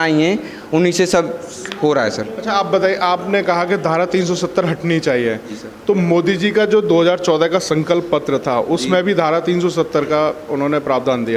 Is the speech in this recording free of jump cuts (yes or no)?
yes